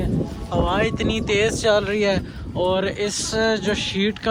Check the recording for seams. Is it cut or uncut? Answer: uncut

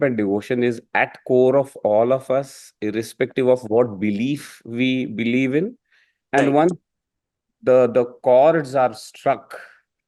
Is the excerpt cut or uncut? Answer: uncut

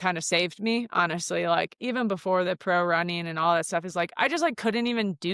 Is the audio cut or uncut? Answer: uncut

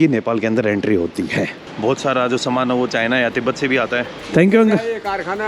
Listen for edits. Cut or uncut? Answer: cut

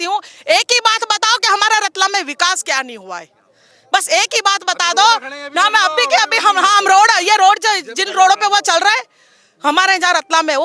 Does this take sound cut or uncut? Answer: uncut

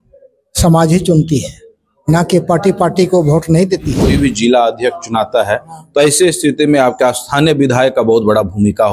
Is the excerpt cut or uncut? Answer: cut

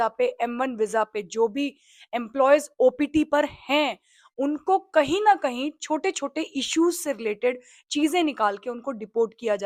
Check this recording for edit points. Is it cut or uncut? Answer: uncut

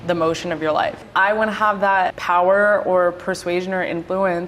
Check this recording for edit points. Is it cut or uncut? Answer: cut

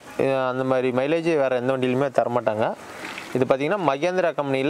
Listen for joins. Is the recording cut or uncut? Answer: uncut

